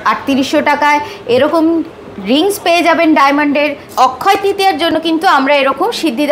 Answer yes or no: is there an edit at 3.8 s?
yes